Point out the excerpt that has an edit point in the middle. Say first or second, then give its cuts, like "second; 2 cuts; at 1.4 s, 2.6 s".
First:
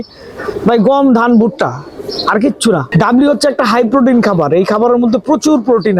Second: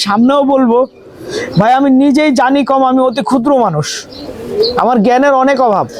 first; 1 cut; at 2.9 s